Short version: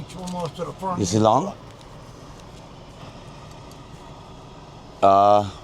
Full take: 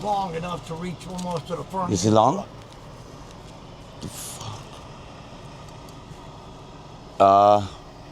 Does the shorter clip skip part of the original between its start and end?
yes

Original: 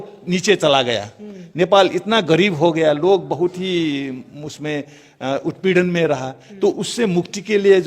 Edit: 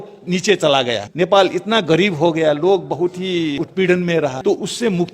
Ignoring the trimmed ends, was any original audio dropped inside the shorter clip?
yes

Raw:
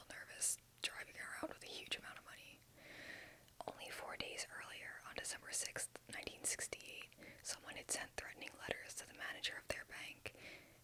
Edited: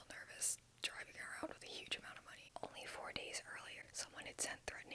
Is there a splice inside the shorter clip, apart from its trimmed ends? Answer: yes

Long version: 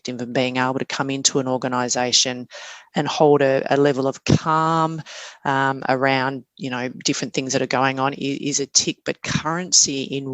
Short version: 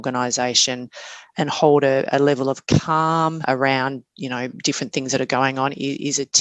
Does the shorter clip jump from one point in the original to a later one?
yes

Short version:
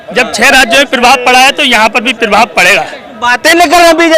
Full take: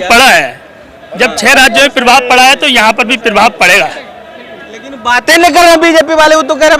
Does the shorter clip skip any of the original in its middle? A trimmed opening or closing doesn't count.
yes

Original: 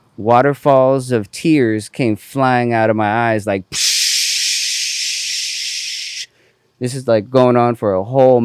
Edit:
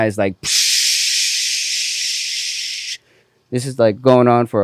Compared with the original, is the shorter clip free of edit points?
yes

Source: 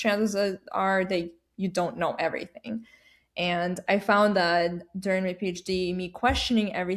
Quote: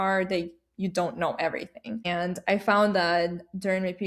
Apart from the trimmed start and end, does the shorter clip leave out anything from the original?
yes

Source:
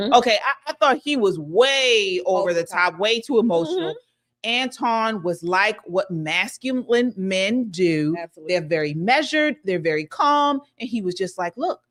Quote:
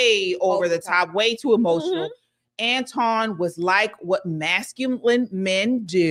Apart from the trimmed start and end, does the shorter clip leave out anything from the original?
no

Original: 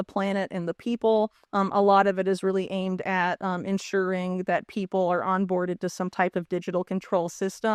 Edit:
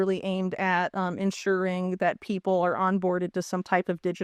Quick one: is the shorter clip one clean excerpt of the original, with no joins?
yes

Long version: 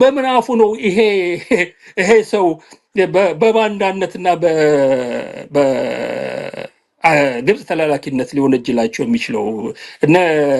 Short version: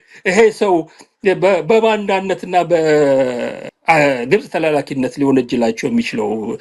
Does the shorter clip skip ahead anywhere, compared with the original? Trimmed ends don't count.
yes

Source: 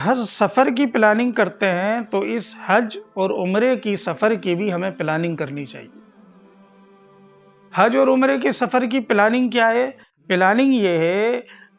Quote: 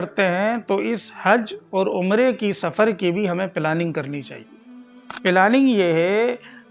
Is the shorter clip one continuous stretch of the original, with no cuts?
no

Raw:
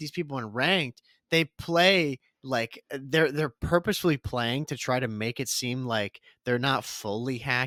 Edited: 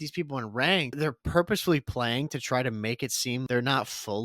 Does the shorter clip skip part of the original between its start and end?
yes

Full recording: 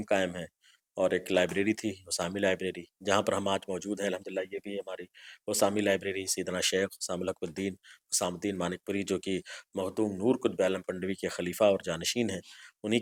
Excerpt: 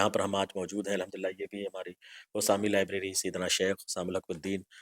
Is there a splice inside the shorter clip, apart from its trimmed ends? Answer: no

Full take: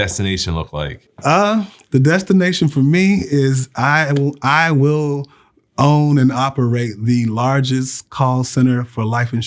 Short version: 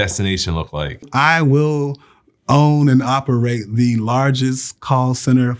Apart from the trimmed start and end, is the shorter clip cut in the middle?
yes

